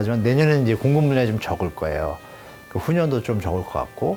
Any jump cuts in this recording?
no; 0 cuts

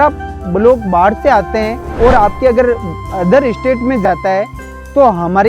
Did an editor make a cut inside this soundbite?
yes; 1 cut; at 1.8 s

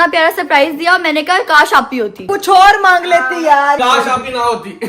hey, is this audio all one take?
no; 2 cuts; at 2.2 s, 3.8 s

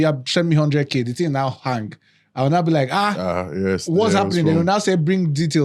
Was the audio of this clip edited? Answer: no; 0 cuts

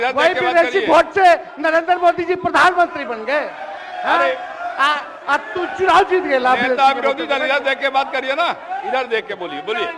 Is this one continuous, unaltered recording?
yes; 0 cuts

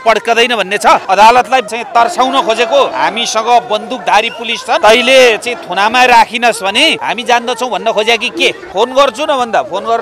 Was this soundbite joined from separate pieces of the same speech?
yes; 6 cuts; at 1.0 s, 1.7 s, 2.9 s, 4.8 s, 7.0 s, 8.6 s

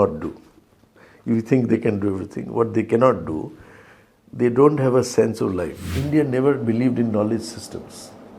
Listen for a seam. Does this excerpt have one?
yes; 1 cut; at 5.9 s

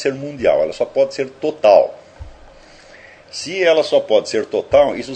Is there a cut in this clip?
no; 0 cuts

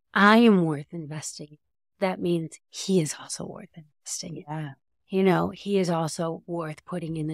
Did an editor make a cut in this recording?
no; 0 cuts

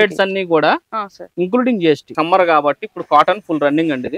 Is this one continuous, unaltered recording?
no; 1 cut; at 2.1 s

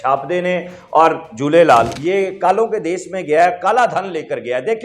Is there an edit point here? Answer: yes; 1 cut; at 1.9 s

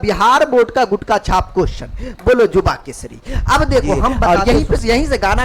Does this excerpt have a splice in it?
yes; 1 cut; at 4.3 s

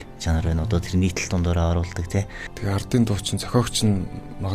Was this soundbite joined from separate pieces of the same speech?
yes; 1 cut; at 2.4 s

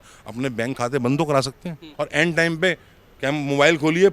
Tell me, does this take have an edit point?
yes; 1 cut; at 1.9 s

